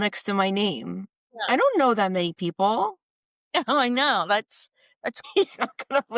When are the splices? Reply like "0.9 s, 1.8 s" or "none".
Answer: 5.3 s